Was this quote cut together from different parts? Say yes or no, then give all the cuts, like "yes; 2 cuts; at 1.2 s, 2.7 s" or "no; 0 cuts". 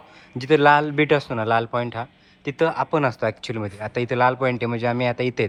no; 0 cuts